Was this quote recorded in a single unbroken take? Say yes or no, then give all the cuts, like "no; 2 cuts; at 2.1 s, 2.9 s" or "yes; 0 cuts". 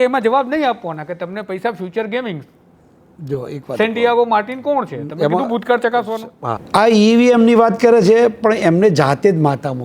no; 1 cut; at 6.6 s